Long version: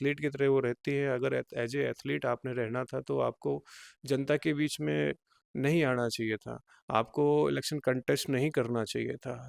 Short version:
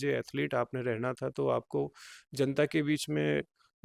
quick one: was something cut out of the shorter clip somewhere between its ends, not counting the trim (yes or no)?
no